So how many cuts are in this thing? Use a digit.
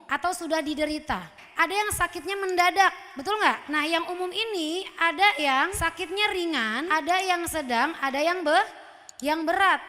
1